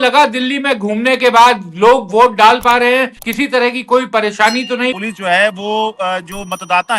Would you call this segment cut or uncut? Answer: cut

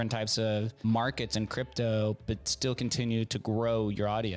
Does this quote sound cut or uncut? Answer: uncut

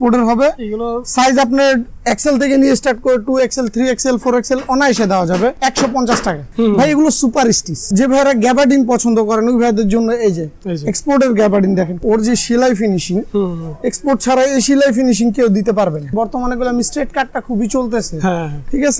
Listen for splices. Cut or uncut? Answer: cut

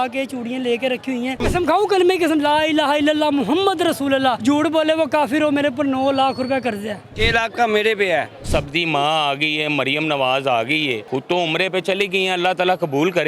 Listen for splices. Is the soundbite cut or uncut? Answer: cut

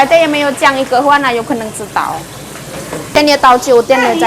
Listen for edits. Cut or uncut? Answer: cut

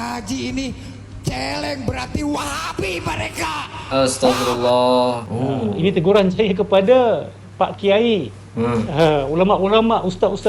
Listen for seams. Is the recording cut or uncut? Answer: cut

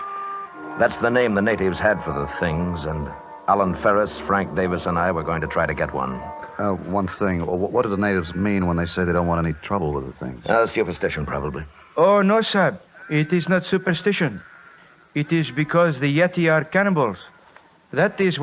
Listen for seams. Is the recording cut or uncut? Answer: cut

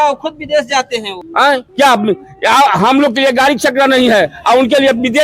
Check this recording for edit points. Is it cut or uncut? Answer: cut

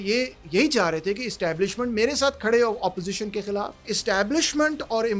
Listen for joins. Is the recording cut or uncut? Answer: cut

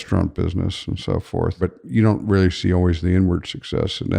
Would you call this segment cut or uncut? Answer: cut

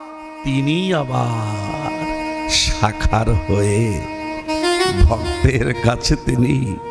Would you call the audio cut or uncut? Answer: uncut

